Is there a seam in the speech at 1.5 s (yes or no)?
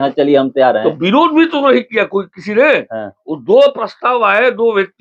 no